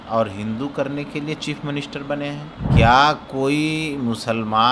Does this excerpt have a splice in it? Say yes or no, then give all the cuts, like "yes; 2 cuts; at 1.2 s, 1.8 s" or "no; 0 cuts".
yes; 1 cut; at 2.6 s